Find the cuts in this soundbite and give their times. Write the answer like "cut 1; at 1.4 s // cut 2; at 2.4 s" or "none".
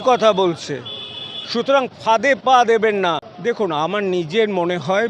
cut 1; at 3.3 s